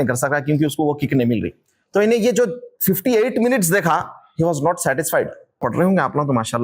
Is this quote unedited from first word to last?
no; 1 cut; at 5.6 s

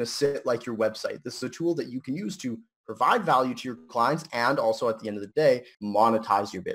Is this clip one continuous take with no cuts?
no; 1 cut; at 5.7 s

